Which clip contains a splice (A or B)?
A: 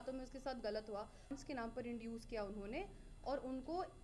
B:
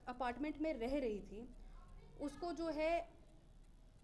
A